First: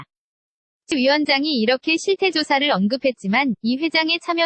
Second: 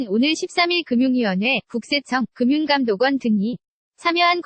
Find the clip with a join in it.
first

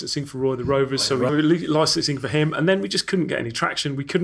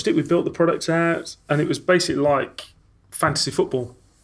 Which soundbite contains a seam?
first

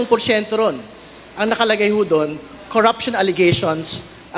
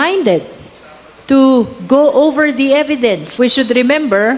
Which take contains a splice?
second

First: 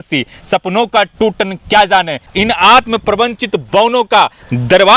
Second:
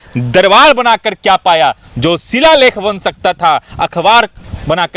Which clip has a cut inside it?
first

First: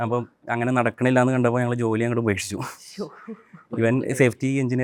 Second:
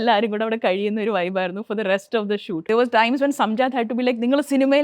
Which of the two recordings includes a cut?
second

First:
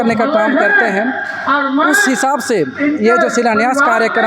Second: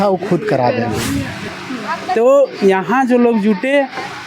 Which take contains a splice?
second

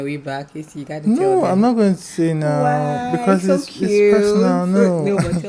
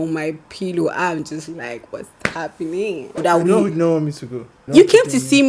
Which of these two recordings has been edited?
second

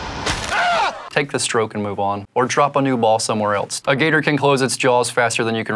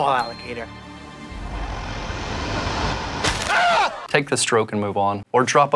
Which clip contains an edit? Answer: first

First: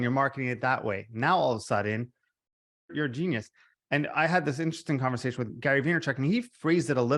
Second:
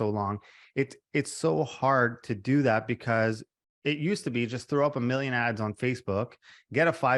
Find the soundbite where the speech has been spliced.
first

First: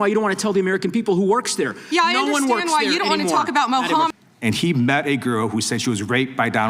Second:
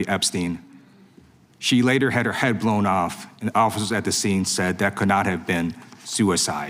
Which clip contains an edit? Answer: first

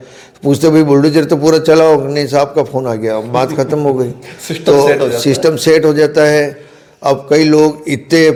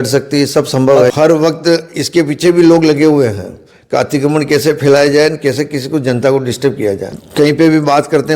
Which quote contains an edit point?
second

